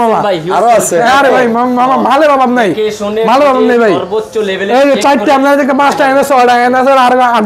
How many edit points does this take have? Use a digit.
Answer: 0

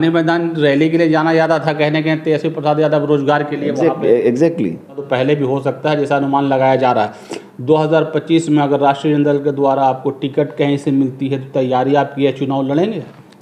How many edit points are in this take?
1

